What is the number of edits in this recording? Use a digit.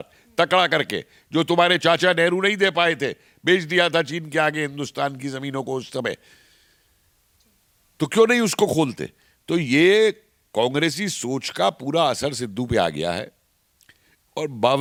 0